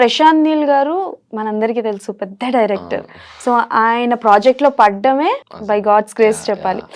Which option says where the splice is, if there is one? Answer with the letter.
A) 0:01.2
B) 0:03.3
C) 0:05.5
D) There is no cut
C